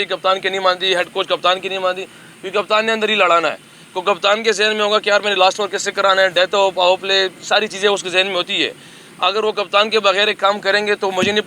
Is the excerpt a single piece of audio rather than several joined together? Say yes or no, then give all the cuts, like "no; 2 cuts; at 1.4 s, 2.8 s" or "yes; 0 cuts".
yes; 0 cuts